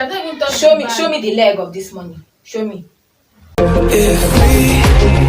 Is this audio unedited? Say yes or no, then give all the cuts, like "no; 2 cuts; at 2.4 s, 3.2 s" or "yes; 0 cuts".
no; 1 cut; at 3.6 s